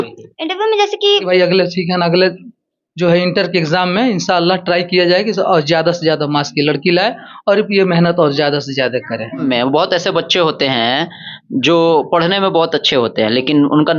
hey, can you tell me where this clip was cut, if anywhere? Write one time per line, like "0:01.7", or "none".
0:01.2
0:09.4